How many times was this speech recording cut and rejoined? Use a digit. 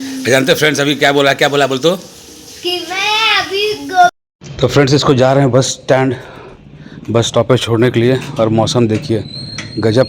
1